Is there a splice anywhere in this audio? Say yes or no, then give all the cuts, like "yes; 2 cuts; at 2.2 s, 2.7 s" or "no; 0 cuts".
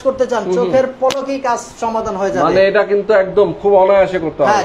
no; 0 cuts